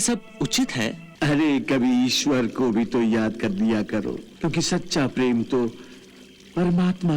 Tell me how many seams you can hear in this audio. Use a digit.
2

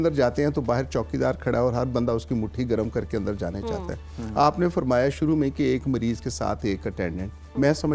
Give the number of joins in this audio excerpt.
0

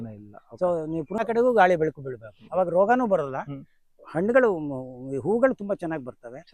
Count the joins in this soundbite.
1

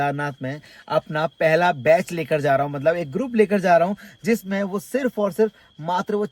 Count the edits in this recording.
0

